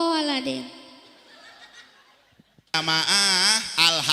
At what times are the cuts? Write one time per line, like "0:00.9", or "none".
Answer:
0:02.8